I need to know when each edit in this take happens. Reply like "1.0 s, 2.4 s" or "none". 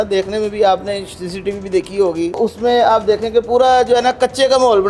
2.4 s